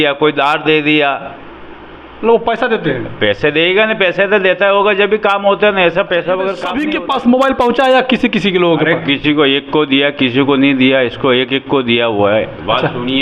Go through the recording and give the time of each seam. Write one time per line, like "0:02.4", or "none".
0:06.6

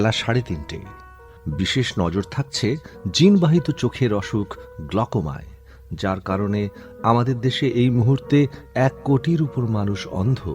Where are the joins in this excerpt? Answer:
0:01.1

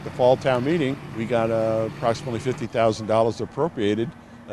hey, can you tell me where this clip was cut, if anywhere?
0:01.0

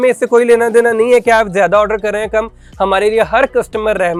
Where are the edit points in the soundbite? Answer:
none

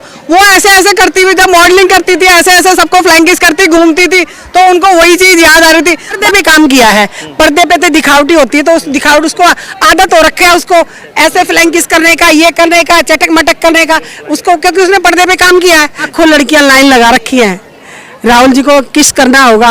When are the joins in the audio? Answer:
0:06.2
0:16.1

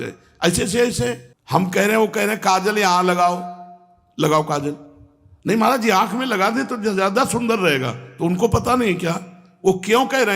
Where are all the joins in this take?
0:01.3

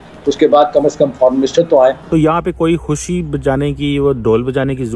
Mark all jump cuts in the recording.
0:02.0

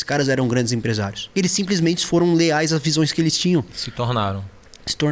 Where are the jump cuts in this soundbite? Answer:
0:01.2

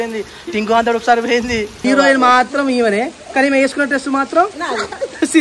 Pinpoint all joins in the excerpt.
0:01.8

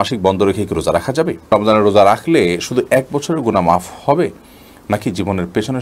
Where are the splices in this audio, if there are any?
0:01.5

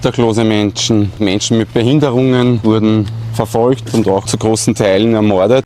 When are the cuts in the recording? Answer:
0:01.2
0:02.6
0:04.3

